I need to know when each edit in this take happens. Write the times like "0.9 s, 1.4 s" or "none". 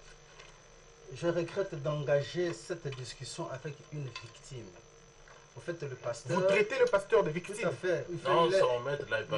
none

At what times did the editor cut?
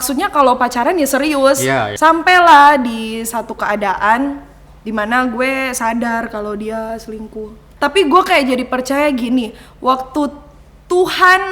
1.9 s, 7.6 s

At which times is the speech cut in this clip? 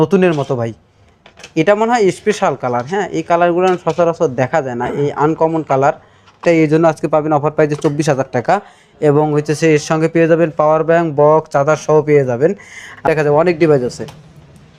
6.4 s, 13.0 s

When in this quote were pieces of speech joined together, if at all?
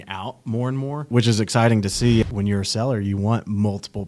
1.1 s, 2.2 s

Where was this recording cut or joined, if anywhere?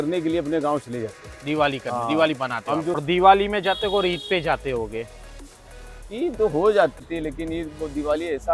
3.0 s, 7.0 s

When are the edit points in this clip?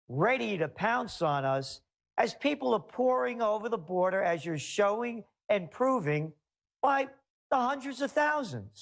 none

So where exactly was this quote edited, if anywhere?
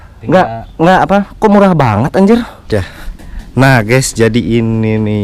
2.6 s

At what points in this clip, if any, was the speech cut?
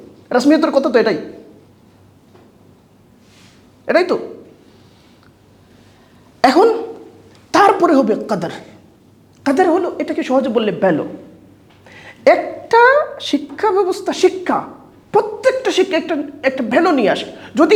none

